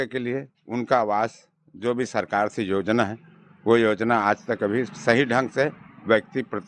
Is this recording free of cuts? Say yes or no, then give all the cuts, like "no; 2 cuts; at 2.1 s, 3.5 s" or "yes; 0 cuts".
yes; 0 cuts